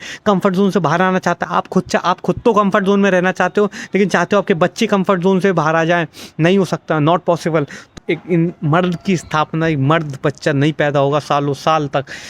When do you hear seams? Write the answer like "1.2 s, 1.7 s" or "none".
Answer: 7.8 s